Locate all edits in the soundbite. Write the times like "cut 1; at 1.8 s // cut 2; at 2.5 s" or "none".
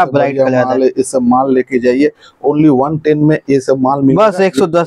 none